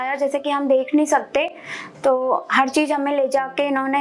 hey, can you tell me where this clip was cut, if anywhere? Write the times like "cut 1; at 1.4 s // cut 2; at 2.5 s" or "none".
none